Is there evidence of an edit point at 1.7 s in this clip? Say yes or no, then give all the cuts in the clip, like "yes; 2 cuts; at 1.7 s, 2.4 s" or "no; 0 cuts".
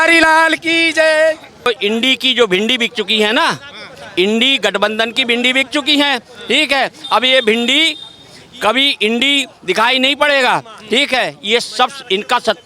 yes; 1 cut; at 1.7 s